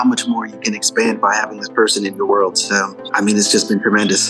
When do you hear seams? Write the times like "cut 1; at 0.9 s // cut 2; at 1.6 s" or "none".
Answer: cut 1; at 3.0 s